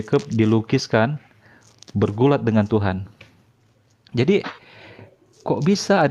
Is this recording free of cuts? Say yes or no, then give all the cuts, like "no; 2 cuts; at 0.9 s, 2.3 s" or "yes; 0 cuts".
yes; 0 cuts